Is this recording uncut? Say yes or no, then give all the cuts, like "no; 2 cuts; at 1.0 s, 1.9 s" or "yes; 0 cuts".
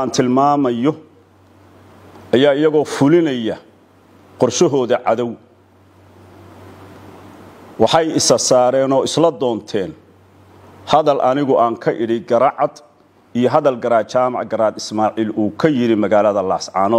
yes; 0 cuts